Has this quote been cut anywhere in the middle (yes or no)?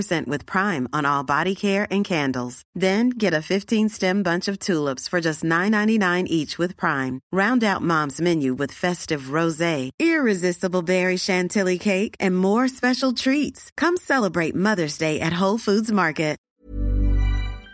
yes